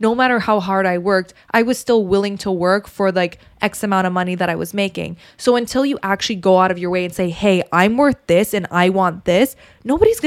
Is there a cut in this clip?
no; 0 cuts

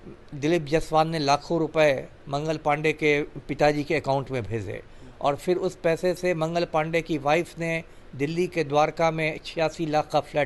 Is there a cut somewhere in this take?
no; 0 cuts

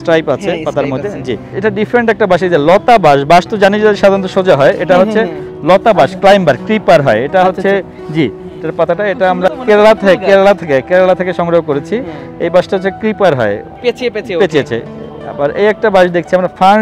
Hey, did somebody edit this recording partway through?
yes; 2 cuts; at 1.5 s, 13.7 s

